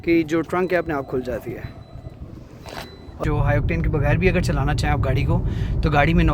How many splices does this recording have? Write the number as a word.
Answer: one